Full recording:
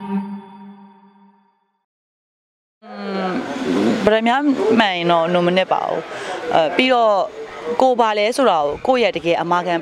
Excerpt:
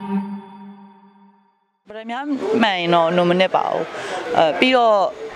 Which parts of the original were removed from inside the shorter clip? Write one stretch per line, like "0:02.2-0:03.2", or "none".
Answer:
0:02.1-0:04.2